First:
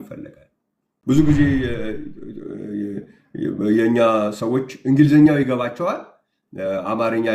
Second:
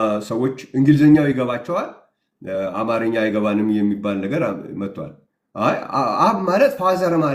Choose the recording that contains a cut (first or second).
first